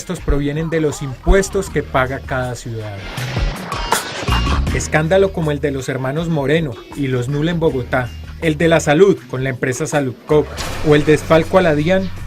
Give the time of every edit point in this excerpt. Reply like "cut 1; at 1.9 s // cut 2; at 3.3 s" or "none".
cut 1; at 2.2 s